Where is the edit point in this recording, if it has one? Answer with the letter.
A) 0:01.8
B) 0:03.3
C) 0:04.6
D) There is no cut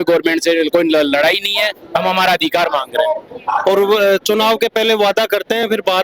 B